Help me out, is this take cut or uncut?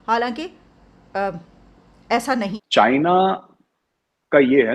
cut